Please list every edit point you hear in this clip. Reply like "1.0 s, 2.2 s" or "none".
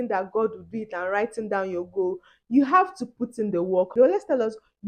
3.9 s